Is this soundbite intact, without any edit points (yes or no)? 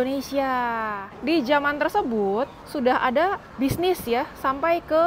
no